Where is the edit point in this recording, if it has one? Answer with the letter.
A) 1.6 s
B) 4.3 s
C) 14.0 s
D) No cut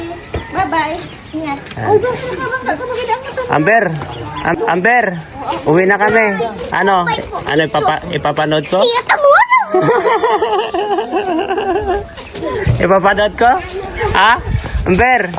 B